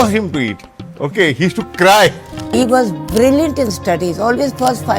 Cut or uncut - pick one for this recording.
cut